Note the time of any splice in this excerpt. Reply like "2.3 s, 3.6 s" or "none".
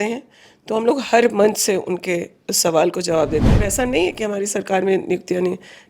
3.6 s